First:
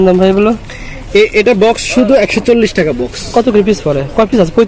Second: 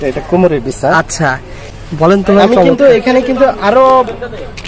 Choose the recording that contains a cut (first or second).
second